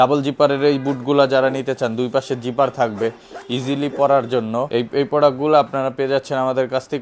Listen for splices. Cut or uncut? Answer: uncut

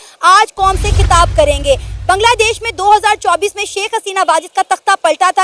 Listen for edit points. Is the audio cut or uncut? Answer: uncut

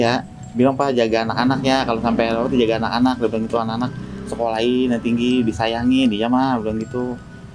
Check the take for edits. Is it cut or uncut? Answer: uncut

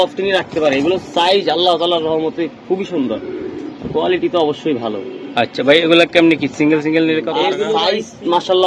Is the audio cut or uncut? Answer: cut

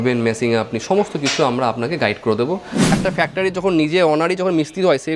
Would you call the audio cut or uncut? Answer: cut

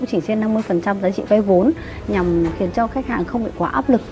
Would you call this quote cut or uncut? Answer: uncut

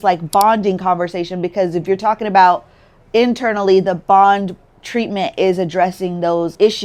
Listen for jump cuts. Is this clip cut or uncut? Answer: uncut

